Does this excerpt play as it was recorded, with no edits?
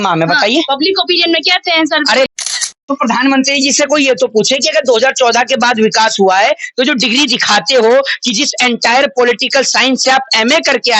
no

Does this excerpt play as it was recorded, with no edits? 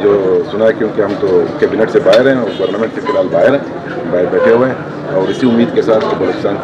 yes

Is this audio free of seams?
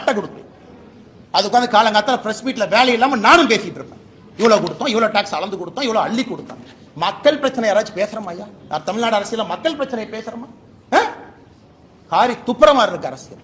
yes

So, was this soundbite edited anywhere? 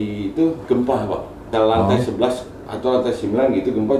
yes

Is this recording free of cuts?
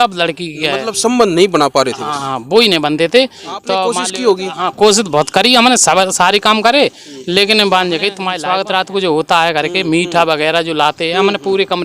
no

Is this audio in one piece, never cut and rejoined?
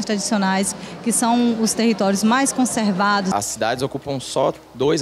no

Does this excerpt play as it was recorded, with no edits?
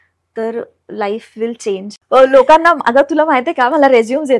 no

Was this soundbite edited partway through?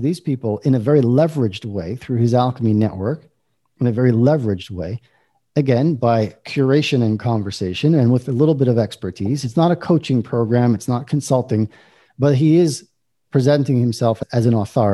no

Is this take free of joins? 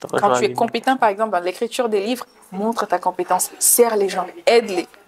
yes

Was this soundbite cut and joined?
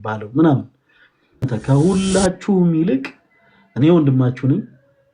yes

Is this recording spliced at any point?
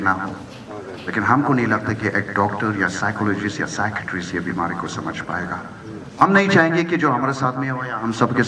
yes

